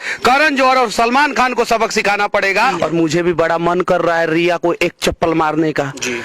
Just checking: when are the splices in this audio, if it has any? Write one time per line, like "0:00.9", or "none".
0:02.8